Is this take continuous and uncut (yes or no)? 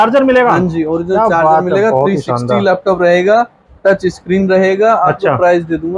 yes